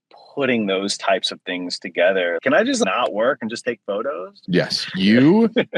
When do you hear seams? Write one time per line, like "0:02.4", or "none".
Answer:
none